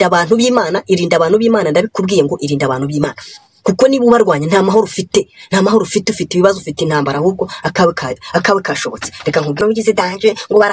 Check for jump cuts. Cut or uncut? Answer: cut